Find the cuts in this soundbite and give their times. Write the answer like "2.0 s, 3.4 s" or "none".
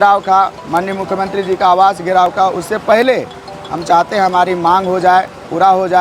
none

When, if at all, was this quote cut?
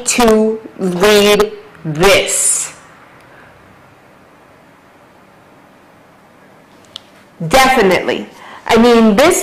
7.8 s

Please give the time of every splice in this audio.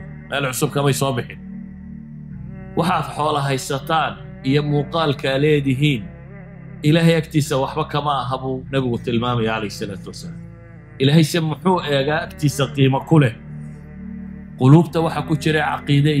1.3 s, 2.6 s, 8.6 s

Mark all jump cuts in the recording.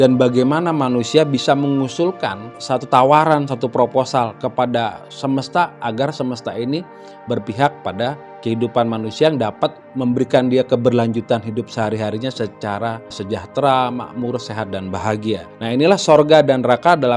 2.5 s, 8.3 s, 9.8 s, 13.2 s, 15.5 s

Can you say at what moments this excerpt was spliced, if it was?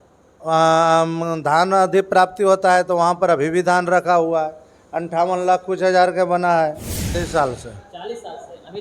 7.0 s

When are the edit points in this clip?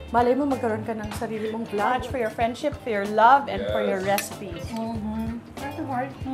1.9 s

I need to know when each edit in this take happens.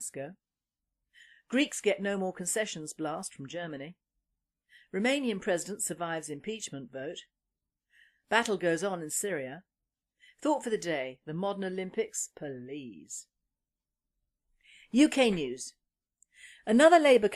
8.0 s

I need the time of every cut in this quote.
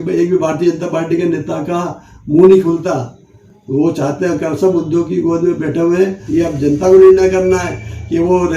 6.2 s

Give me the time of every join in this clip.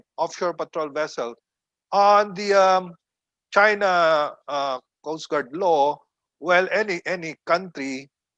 1.5 s

